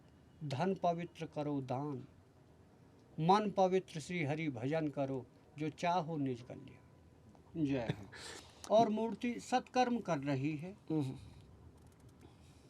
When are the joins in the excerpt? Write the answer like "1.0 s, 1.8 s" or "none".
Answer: 7.5 s